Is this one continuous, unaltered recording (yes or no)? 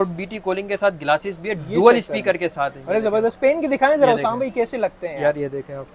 yes